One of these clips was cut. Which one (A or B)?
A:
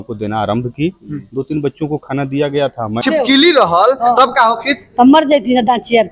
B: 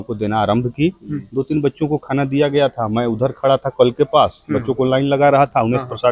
A